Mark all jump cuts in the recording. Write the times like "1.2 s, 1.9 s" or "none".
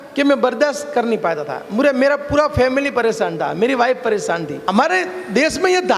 4.6 s